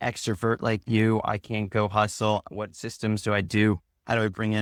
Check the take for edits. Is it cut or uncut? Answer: uncut